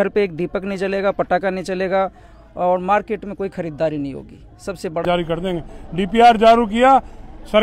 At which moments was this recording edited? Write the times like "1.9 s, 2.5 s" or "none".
5.0 s

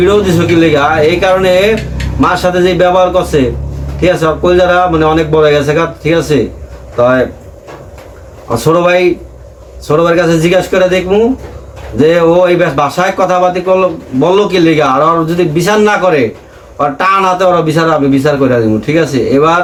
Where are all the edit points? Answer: none

